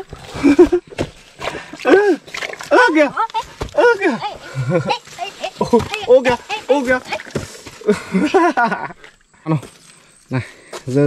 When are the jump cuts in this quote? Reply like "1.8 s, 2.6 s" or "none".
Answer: 9.5 s